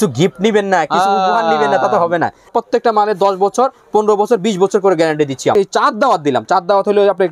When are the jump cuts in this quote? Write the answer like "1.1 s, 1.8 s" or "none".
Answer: 2.5 s, 5.5 s

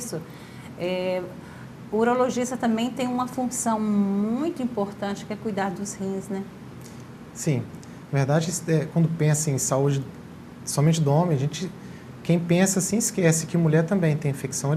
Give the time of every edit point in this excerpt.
none

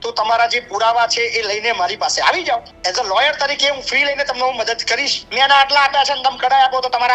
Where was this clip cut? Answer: 2.7 s, 5.2 s

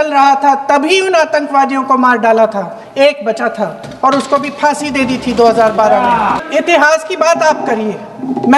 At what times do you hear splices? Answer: 6.4 s

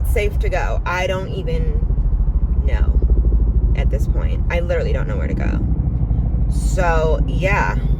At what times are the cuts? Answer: none

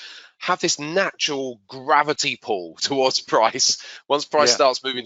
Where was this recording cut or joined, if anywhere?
none

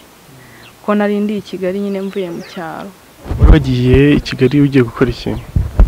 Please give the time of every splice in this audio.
3.2 s

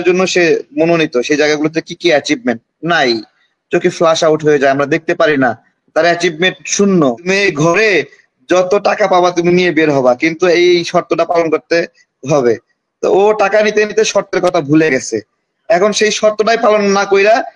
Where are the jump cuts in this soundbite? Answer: 7.3 s

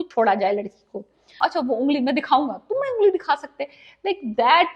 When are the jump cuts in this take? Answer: 1.4 s

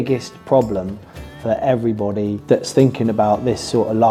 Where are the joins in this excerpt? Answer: none

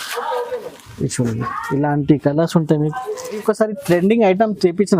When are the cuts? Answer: 3.4 s

